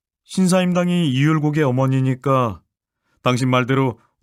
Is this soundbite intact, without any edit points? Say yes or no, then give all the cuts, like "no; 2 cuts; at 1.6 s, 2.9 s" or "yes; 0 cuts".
yes; 0 cuts